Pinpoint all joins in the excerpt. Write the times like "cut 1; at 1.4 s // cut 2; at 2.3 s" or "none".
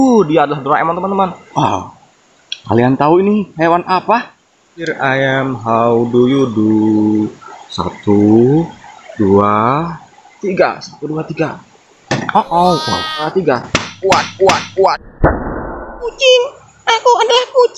cut 1; at 1.4 s // cut 2; at 4.9 s // cut 3; at 13.3 s // cut 4; at 16.2 s